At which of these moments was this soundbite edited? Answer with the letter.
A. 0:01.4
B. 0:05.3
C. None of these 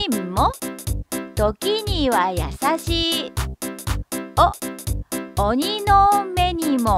B